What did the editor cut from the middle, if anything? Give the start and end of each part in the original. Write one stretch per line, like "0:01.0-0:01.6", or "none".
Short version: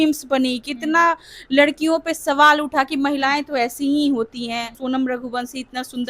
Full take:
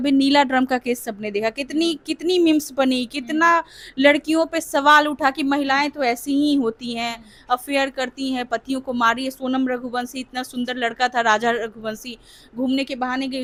0:07.2-0:09.4